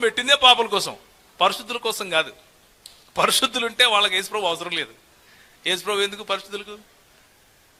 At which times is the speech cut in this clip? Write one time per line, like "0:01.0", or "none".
none